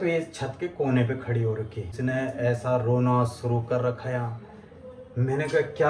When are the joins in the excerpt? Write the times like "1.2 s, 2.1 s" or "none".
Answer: 1.9 s

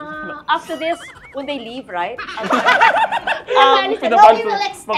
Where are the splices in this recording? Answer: none

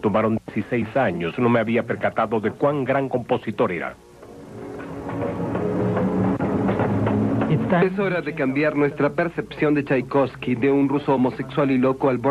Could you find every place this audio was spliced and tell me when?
5.3 s

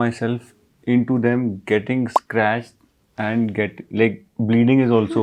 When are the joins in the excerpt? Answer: none

